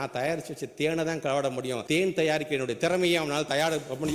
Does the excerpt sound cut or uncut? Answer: cut